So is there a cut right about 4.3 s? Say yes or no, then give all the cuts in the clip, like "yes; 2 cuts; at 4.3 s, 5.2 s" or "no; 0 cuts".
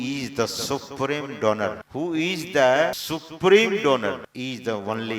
yes; 3 cuts; at 1.8 s, 3.0 s, 4.3 s